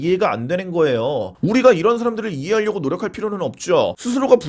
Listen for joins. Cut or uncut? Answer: uncut